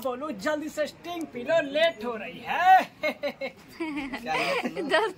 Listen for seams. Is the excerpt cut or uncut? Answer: uncut